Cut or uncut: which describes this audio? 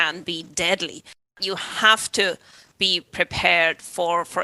cut